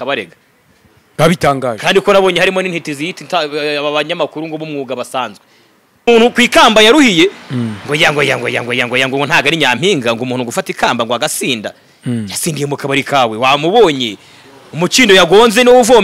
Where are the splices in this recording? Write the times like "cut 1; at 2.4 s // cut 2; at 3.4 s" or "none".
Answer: cut 1; at 6.1 s